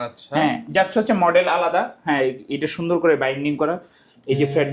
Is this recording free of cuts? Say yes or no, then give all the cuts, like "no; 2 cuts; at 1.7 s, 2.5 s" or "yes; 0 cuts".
yes; 0 cuts